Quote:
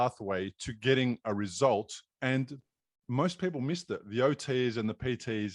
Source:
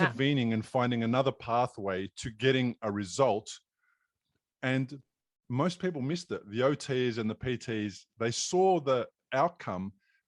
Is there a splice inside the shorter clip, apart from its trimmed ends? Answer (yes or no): yes